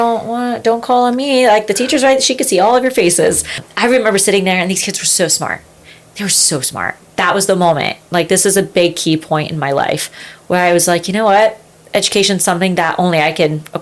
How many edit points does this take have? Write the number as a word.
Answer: two